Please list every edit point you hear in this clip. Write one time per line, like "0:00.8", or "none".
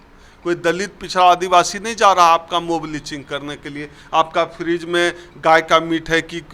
none